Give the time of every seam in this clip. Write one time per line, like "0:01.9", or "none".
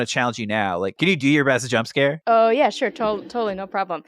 0:00.9
0:02.2